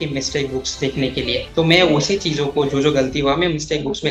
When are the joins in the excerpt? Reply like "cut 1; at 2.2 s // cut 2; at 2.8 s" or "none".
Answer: none